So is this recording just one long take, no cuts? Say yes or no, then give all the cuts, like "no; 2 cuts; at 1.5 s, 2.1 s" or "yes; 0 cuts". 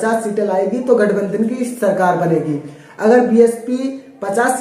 yes; 0 cuts